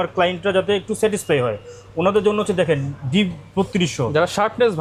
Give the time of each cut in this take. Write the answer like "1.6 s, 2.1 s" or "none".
none